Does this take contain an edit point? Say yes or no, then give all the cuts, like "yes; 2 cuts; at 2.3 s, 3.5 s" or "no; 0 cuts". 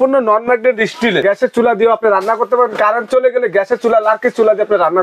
yes; 1 cut; at 1.2 s